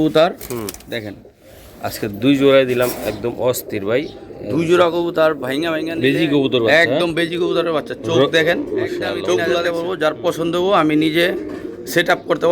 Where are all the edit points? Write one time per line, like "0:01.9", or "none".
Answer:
0:05.8
0:09.7